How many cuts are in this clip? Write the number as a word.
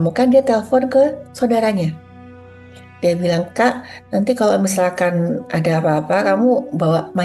zero